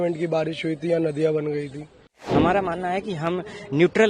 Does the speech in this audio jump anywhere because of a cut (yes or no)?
yes